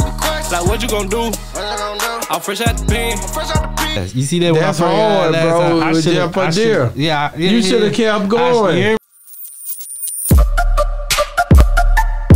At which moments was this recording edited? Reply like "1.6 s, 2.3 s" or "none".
9.0 s